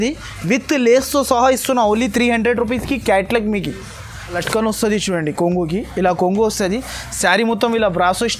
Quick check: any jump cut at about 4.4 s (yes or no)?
yes